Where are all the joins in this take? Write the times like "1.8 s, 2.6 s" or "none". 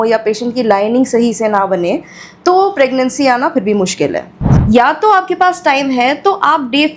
4.6 s